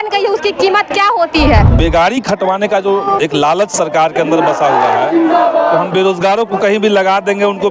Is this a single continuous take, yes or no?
no